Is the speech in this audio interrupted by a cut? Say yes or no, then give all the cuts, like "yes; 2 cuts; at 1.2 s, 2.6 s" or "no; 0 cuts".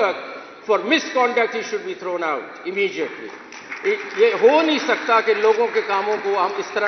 no; 0 cuts